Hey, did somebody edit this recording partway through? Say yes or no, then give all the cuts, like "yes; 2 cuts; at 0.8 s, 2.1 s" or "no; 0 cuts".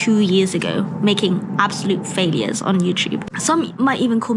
no; 0 cuts